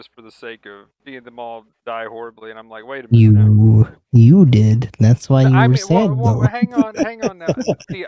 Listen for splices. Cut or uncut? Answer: cut